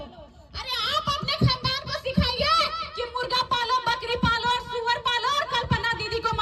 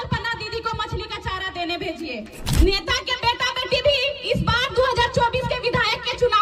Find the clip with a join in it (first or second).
second